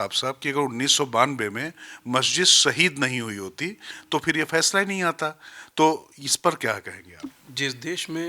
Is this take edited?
no; 0 cuts

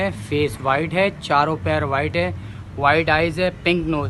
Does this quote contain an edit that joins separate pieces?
no; 0 cuts

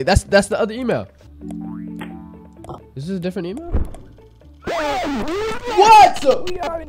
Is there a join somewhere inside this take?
yes; 1 cut; at 1.2 s

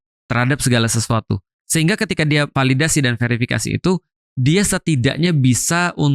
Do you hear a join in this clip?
yes; 2 cuts; at 1.6 s, 2.5 s

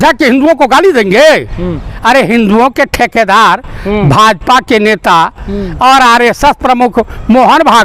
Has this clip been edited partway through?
yes; 1 cut; at 1.9 s

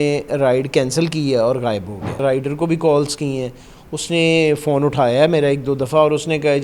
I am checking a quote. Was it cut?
yes; 1 cut; at 2.2 s

